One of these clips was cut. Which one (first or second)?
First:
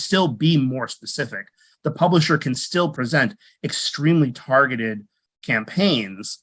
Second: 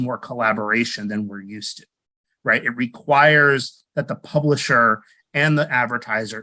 first